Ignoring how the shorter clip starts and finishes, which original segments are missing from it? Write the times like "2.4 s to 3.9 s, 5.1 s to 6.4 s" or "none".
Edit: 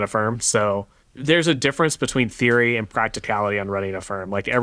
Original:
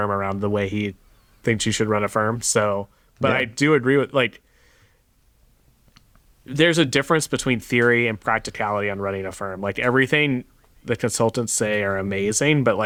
3.0 s to 6.3 s